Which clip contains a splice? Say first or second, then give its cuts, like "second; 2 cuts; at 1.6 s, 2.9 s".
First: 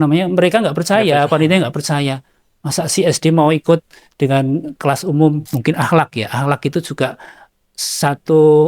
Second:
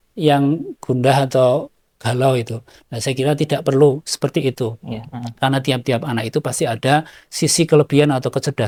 first; 1 cut; at 5.5 s